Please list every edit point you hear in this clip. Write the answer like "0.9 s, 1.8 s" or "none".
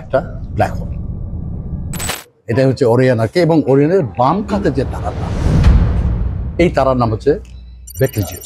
2.2 s